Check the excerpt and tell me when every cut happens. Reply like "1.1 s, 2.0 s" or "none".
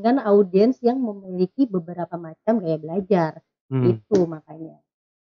none